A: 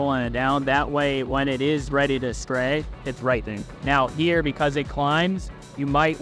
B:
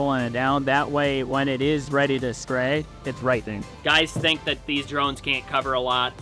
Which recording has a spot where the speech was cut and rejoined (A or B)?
B